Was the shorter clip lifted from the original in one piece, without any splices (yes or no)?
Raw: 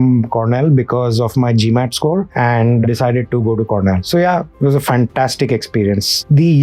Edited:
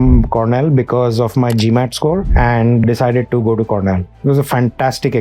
no